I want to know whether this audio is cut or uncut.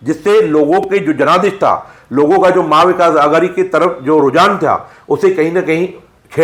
uncut